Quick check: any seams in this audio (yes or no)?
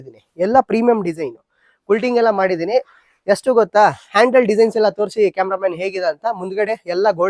no